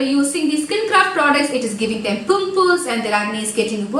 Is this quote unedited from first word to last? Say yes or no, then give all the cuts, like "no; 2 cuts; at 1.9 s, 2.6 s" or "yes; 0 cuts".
yes; 0 cuts